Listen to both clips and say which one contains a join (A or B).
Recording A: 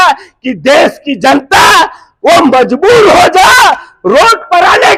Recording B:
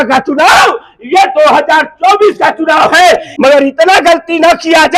B